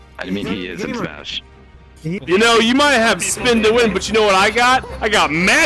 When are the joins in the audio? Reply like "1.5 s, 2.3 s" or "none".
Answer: 2.2 s